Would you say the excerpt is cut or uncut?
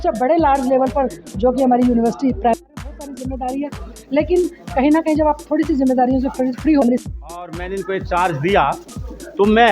cut